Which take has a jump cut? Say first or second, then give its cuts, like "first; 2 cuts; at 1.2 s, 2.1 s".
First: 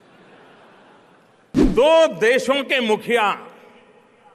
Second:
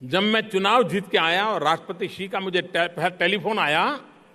first; 1 cut; at 1.6 s